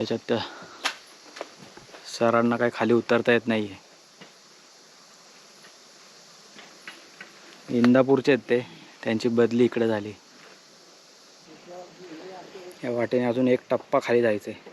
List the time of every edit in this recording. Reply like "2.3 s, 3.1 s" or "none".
11.4 s